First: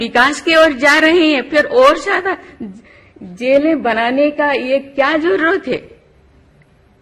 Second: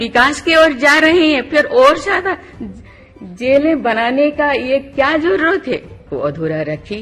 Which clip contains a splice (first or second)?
second